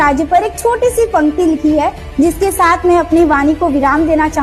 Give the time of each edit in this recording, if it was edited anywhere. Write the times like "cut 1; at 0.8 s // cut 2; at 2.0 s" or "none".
none